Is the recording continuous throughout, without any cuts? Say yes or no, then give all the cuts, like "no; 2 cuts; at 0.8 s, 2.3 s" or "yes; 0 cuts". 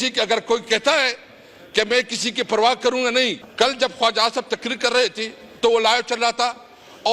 no; 1 cut; at 3.4 s